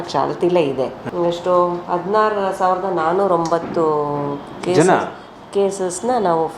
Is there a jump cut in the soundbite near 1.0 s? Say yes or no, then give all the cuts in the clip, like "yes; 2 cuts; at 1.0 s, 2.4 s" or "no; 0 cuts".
yes; 1 cut; at 1.0 s